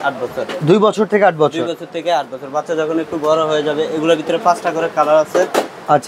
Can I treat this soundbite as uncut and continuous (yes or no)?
yes